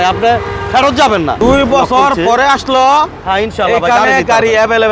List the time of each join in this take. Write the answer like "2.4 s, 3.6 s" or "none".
1.4 s